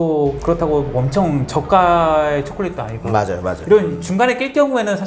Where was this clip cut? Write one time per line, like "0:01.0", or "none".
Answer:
none

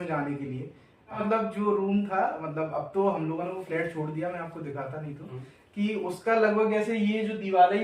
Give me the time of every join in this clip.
0:01.2

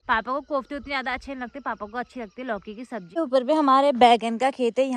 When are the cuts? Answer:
0:03.2

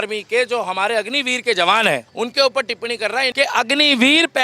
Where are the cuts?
0:02.1
0:03.3

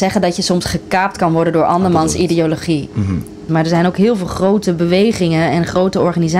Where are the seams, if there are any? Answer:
0:03.5

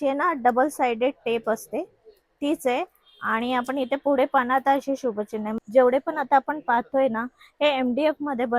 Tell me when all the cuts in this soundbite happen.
0:05.6

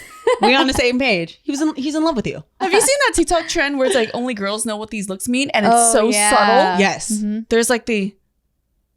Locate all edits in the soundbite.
0:02.7

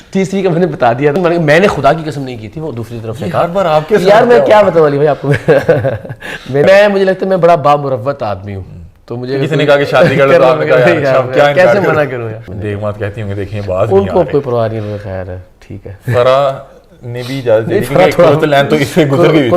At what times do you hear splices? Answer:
0:01.1
0:06.6
0:12.4

